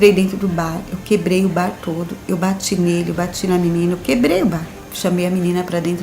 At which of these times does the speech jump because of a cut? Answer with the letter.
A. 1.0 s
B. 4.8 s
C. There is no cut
B